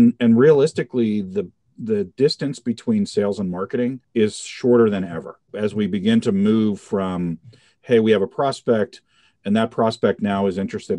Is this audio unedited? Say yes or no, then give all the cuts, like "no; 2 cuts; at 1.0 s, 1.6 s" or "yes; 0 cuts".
no; 2 cuts; at 4.0 s, 5.4 s